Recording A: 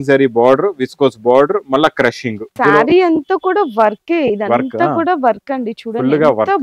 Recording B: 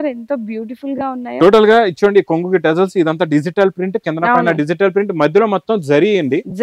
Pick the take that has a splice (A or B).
A